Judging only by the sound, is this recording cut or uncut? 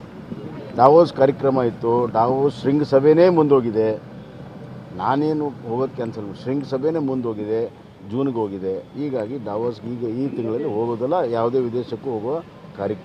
uncut